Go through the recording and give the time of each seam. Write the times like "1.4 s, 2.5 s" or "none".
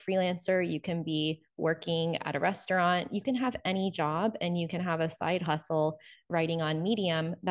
none